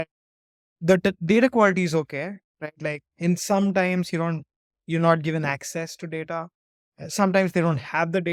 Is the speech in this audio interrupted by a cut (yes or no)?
no